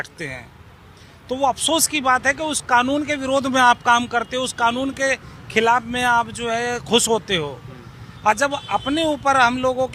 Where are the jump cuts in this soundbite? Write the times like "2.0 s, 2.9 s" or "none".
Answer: none

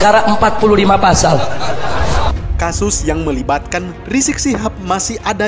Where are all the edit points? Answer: 2.4 s

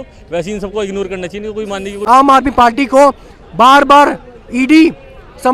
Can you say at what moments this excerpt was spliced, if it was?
1.9 s

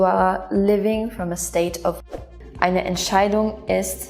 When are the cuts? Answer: 2.0 s

